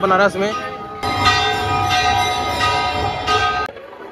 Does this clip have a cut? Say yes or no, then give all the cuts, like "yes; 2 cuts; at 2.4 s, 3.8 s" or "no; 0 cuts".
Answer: yes; 1 cut; at 1.0 s